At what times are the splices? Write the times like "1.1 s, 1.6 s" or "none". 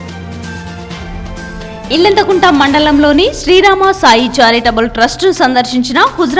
1.6 s